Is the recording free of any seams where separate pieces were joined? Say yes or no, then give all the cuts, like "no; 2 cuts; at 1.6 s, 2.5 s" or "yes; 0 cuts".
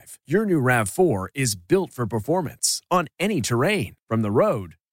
yes; 0 cuts